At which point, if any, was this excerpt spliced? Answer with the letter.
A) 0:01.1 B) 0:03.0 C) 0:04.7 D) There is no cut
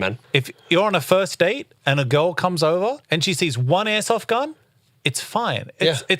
B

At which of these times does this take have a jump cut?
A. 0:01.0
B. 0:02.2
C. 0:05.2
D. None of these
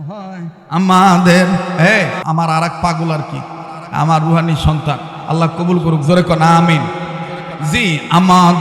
B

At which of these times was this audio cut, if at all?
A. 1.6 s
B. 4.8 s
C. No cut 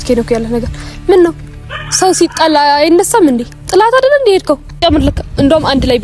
B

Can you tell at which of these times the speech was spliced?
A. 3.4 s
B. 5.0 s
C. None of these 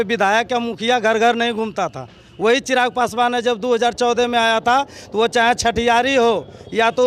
C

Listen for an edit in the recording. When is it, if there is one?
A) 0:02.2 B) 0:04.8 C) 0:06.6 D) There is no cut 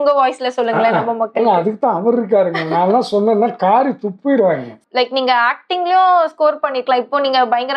B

